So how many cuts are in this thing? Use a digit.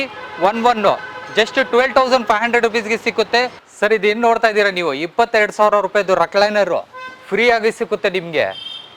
1